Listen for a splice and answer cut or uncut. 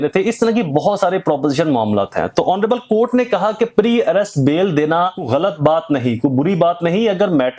cut